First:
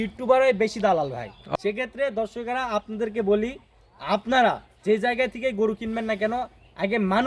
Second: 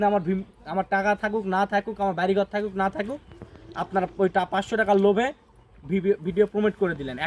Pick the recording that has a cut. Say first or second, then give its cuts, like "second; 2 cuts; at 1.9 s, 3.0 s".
first; 1 cut; at 1.4 s